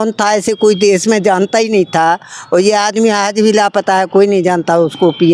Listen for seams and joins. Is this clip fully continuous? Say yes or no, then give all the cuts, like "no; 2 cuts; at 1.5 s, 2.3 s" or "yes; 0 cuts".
yes; 0 cuts